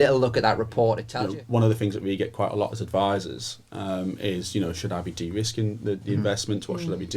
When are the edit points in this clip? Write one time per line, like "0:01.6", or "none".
0:01.1